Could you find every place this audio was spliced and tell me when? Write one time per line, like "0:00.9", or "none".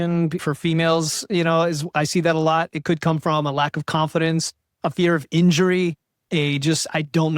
0:06.2